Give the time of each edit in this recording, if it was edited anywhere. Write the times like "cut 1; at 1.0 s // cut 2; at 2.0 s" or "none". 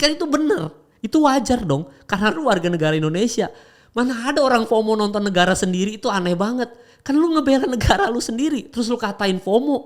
none

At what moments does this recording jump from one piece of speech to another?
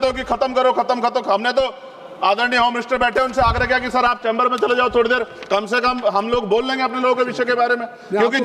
none

